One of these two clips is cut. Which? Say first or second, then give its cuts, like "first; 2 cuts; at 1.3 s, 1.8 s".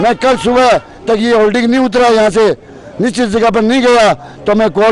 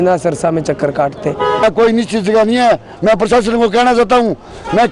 second; 1 cut; at 1.7 s